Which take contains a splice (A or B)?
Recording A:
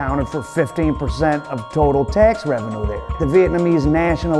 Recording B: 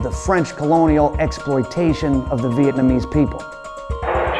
A